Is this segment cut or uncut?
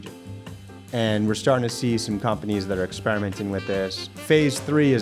cut